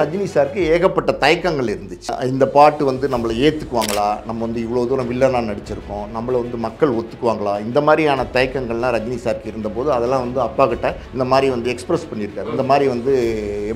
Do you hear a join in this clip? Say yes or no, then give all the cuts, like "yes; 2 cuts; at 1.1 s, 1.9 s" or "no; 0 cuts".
yes; 2 cuts; at 2.1 s, 11.0 s